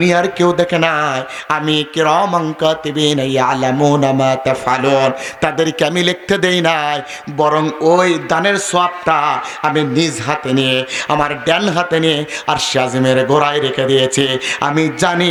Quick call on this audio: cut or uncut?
uncut